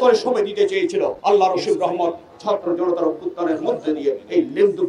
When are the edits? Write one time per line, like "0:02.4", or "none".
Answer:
0:01.2